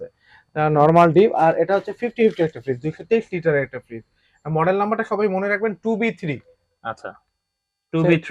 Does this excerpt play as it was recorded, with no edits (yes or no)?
yes